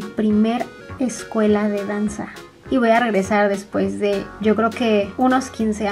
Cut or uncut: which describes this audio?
uncut